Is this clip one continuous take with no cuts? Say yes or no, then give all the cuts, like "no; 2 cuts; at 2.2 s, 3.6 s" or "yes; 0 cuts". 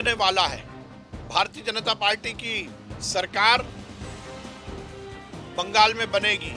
no; 2 cuts; at 4.0 s, 5.5 s